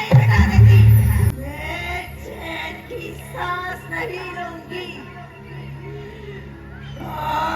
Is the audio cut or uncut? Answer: cut